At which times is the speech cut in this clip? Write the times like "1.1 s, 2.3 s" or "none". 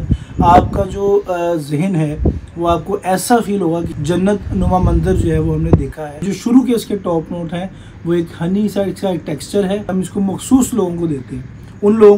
3.9 s, 6.2 s, 9.9 s

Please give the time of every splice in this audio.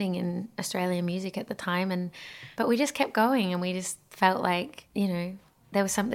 none

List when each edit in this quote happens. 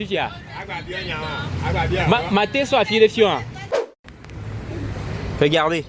3.9 s

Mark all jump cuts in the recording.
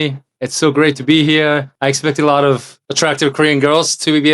1.7 s, 2.8 s

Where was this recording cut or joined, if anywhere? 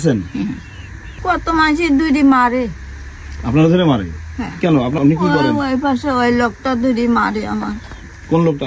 1.1 s, 5.0 s

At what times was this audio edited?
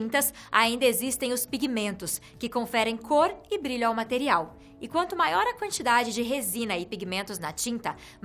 none

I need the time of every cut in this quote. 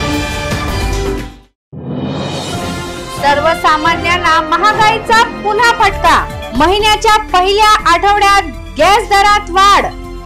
2.9 s

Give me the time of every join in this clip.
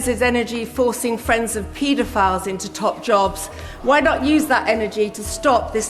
none

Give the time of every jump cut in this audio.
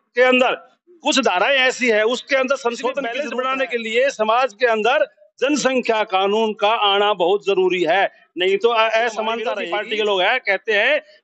3.2 s, 9.5 s

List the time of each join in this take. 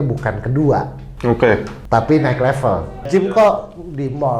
3.0 s

